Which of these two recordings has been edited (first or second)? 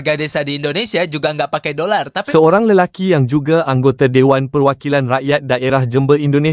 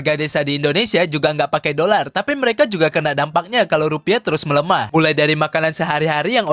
first